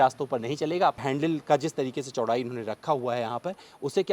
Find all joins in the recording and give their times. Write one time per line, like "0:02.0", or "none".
0:01.0